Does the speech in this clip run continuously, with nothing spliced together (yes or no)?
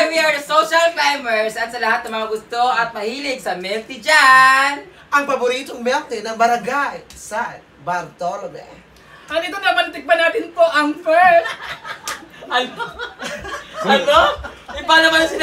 yes